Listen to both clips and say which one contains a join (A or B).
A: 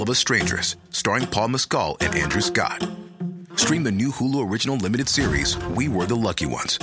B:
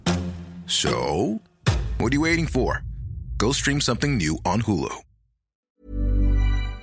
B